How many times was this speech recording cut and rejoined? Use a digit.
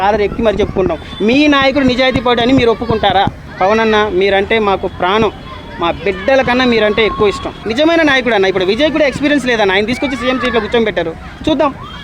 2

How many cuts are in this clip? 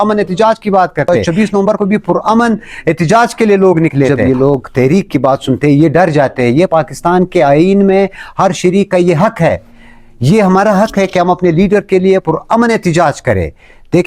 2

